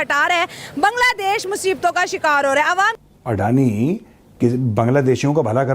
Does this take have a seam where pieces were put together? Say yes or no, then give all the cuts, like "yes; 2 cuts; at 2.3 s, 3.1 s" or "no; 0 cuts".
yes; 1 cut; at 2.9 s